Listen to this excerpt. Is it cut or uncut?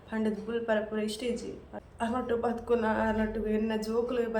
cut